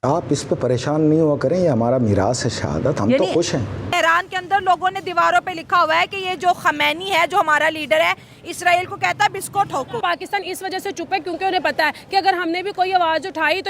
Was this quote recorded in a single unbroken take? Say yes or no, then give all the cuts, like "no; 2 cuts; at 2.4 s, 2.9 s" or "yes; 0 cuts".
no; 2 cuts; at 3.9 s, 10.0 s